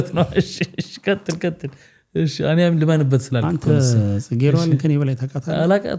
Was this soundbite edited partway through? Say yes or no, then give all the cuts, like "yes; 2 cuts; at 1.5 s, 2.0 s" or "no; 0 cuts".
no; 0 cuts